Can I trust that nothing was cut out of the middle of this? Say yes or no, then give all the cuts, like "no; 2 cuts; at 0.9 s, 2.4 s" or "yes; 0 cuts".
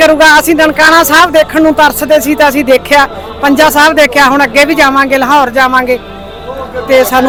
yes; 0 cuts